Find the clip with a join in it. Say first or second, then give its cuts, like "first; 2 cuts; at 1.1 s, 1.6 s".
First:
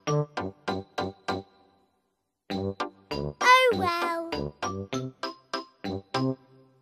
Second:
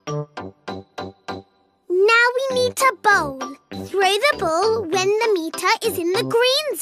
second; 1 cut; at 1.7 s